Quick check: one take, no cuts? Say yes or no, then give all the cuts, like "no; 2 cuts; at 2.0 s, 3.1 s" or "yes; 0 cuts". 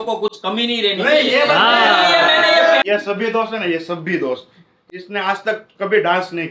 no; 1 cut; at 2.8 s